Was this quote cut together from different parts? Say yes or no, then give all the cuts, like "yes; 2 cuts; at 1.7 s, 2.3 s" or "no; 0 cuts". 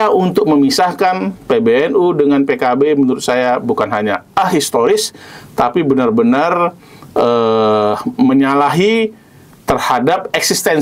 no; 0 cuts